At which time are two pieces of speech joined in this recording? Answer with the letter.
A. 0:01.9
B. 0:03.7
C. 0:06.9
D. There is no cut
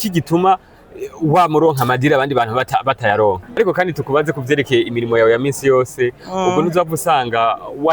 B